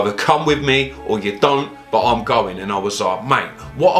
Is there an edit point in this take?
no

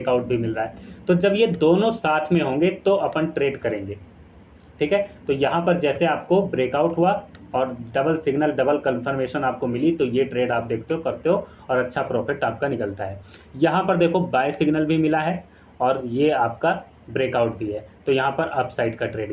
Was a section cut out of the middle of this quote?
no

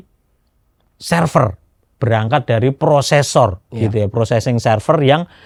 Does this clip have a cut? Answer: no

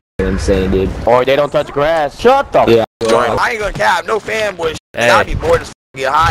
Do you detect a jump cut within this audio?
yes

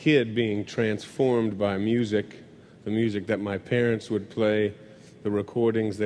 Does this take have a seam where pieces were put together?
yes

